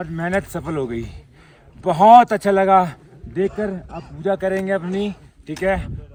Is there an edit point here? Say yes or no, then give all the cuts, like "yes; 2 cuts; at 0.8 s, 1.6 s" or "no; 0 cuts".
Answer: no; 0 cuts